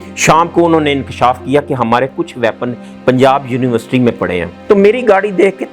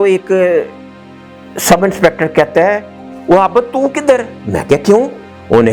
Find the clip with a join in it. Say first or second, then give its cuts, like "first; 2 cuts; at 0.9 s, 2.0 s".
first; 1 cut; at 4.5 s